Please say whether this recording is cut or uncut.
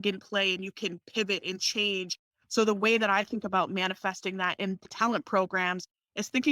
cut